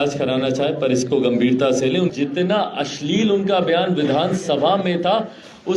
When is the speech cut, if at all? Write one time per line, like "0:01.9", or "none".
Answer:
0:02.1

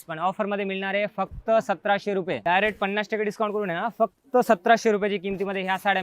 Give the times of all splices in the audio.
0:02.4

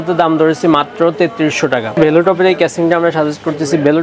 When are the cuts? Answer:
0:02.0

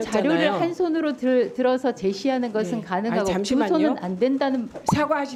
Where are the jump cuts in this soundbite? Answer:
none

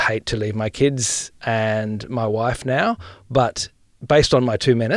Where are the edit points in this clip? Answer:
0:01.3
0:03.9

